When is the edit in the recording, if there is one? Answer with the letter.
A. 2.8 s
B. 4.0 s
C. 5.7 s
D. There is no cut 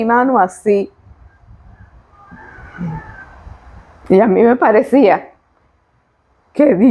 D